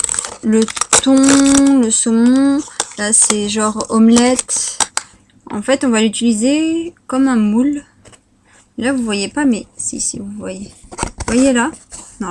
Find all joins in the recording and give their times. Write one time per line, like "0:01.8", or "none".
0:03.6